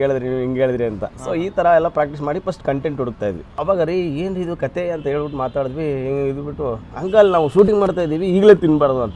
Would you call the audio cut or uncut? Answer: cut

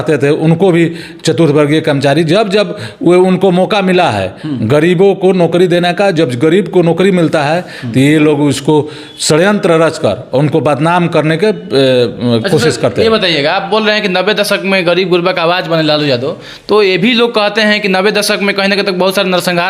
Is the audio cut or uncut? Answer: uncut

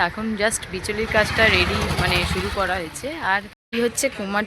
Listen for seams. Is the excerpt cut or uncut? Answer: cut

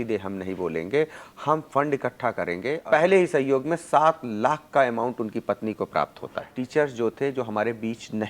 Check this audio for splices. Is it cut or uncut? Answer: cut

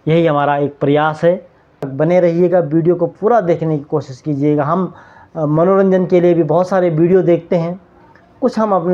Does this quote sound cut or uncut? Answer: cut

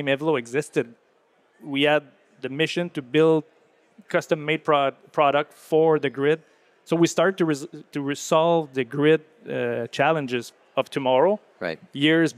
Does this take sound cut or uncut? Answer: uncut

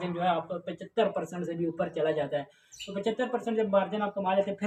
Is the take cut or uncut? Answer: uncut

